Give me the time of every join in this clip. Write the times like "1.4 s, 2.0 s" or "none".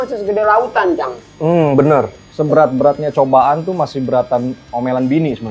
2.2 s